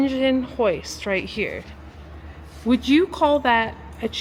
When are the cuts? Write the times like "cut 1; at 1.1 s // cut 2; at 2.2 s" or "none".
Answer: none